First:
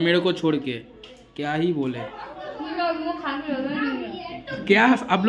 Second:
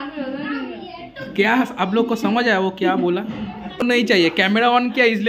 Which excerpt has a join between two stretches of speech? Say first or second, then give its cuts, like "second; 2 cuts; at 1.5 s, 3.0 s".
second; 1 cut; at 3.8 s